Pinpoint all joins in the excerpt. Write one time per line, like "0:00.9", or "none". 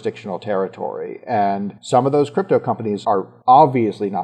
0:01.7
0:03.1